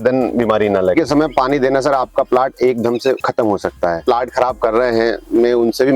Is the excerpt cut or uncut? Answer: cut